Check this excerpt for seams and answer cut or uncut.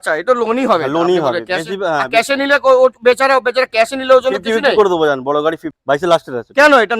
cut